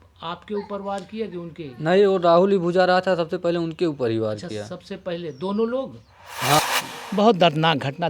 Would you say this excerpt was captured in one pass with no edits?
no; 1 cut; at 6.6 s

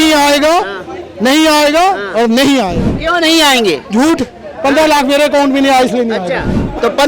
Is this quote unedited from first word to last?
no; 1 cut; at 2.9 s

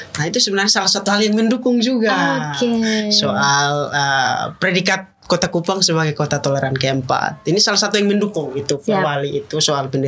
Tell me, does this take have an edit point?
no; 0 cuts

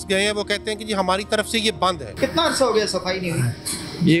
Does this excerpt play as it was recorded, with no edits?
no; 1 cut; at 2.1 s

